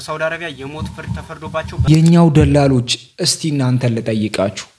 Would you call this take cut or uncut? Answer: cut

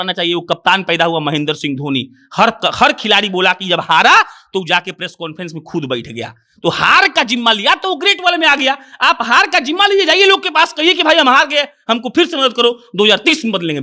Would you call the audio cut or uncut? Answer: uncut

